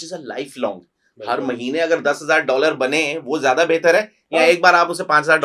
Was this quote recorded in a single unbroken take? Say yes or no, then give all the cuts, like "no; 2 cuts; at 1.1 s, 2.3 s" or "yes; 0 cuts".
yes; 0 cuts